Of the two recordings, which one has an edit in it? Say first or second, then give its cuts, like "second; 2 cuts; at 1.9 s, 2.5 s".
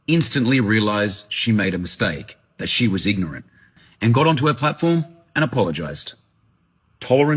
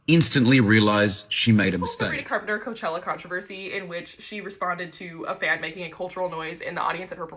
second; 1 cut; at 2.3 s